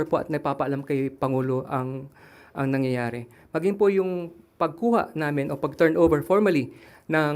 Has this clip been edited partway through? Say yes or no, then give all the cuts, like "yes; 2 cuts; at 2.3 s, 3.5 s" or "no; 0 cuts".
no; 0 cuts